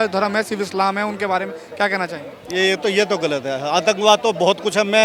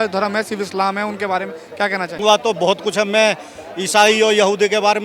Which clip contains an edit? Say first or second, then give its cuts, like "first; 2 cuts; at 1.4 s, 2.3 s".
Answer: second; 1 cut; at 2.2 s